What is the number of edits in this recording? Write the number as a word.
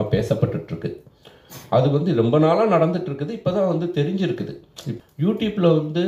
one